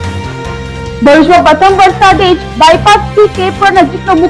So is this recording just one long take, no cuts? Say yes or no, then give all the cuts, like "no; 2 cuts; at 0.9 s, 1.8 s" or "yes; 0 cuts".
no; 1 cut; at 1.0 s